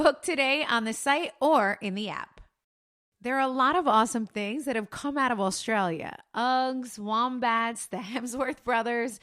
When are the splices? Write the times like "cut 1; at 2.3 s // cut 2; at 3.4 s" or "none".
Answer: none